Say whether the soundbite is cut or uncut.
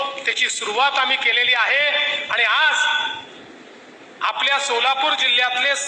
uncut